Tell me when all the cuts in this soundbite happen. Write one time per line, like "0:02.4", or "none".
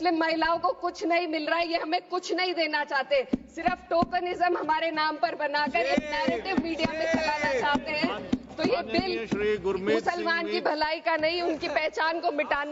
none